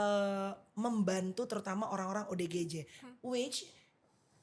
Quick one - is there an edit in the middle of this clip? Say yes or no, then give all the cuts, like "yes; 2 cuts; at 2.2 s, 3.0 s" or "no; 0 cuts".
no; 0 cuts